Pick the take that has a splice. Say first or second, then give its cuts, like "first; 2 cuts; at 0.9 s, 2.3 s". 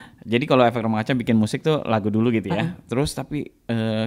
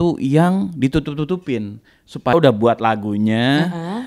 second; 1 cut; at 2.3 s